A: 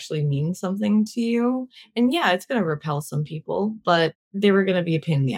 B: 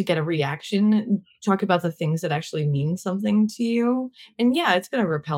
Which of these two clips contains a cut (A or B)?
A